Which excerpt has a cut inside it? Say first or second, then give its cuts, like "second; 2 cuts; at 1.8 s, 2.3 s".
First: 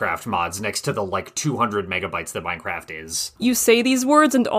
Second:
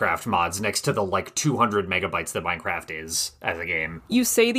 first; 1 cut; at 3.3 s